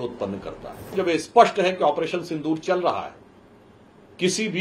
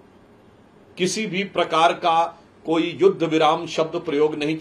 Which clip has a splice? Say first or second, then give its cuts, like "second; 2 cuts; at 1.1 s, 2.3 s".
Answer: first; 1 cut; at 0.9 s